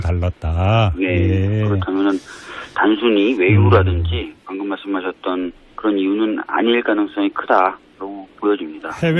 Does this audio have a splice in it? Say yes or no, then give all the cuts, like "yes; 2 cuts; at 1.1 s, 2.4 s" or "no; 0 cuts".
no; 0 cuts